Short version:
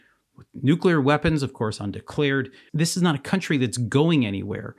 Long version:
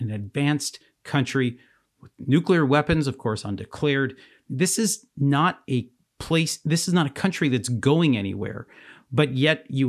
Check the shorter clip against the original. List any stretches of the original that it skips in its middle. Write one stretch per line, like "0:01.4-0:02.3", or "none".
0:04.3-0:06.6